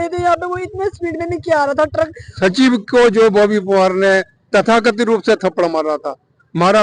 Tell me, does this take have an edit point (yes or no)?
yes